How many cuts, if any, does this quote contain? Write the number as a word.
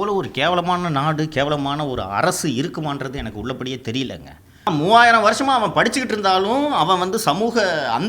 one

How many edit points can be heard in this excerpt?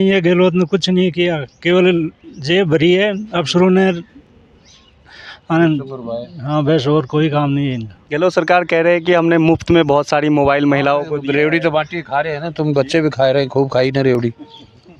zero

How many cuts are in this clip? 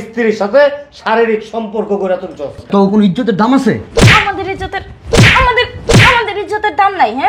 one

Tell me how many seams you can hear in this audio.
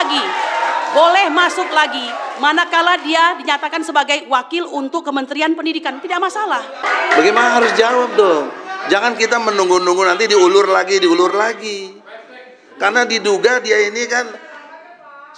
one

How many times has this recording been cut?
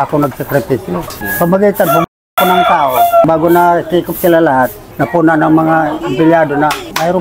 zero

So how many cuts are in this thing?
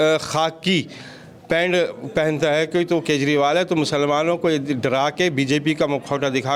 zero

